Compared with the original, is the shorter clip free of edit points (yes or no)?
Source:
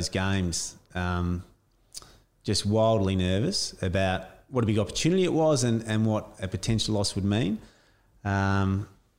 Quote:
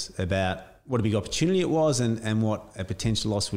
yes